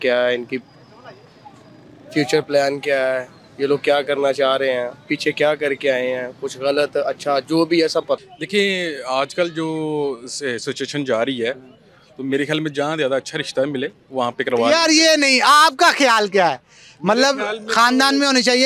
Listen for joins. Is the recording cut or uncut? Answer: cut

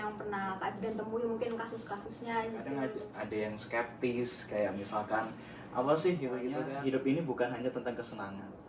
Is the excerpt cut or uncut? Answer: cut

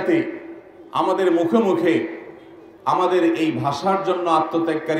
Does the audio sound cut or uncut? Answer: uncut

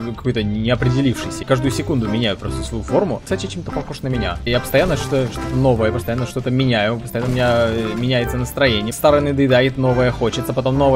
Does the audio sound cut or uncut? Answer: cut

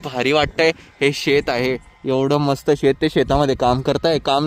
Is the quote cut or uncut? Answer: uncut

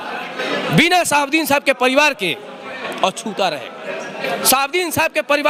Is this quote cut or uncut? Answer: uncut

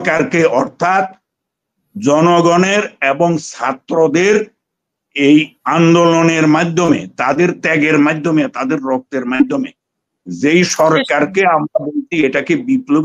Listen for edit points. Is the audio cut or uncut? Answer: uncut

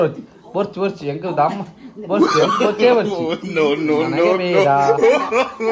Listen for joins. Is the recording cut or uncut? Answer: uncut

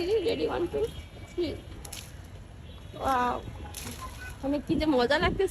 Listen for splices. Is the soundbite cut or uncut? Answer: uncut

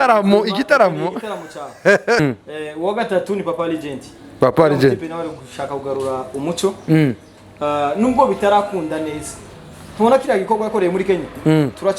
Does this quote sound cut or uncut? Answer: cut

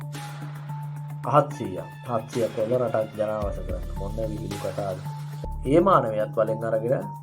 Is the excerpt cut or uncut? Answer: cut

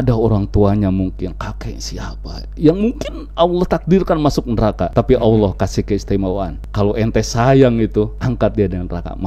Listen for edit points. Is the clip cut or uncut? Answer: cut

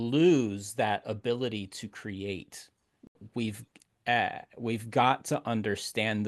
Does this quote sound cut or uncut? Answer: cut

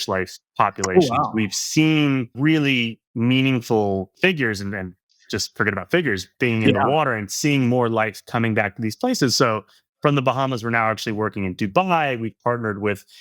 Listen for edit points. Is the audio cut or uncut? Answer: cut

